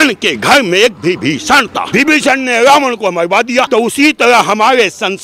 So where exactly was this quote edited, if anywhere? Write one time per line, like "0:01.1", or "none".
0:01.8
0:03.7